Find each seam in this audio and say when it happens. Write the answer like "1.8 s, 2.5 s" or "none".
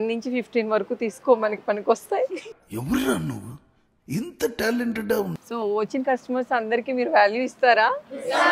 5.4 s